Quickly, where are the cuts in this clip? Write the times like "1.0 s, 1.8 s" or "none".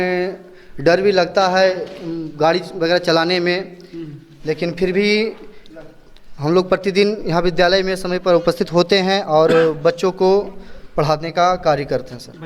none